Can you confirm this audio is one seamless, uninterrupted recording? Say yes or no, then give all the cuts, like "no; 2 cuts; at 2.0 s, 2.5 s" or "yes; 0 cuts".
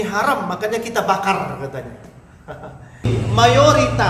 no; 1 cut; at 3.1 s